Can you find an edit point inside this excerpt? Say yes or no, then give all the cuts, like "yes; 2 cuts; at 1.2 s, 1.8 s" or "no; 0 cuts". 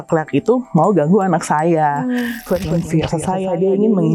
yes; 1 cut; at 2.4 s